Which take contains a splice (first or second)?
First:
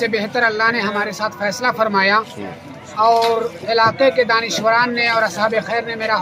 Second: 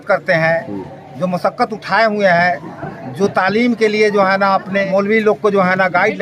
second